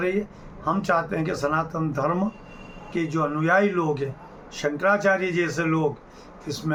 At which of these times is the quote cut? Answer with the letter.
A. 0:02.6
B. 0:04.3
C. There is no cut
C